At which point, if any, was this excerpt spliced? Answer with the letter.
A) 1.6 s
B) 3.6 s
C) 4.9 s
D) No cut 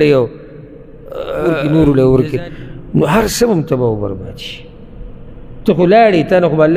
A